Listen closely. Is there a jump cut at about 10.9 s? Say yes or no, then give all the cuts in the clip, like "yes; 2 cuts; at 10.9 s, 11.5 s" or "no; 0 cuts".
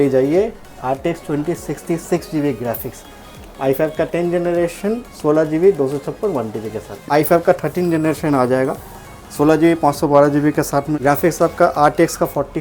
yes; 2 cuts; at 7.0 s, 10.9 s